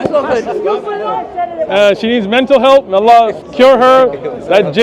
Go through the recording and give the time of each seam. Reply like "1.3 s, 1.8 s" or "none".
1.2 s